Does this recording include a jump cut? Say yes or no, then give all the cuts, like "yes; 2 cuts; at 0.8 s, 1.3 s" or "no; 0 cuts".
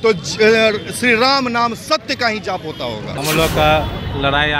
yes; 1 cut; at 3.1 s